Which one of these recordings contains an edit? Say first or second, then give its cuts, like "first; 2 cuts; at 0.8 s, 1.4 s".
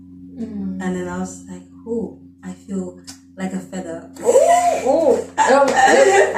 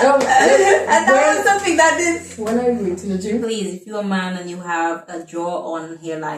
second; 1 cut; at 3.0 s